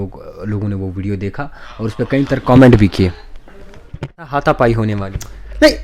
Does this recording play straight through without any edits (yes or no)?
no